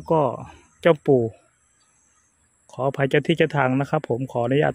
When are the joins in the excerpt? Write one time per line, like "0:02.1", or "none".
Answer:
none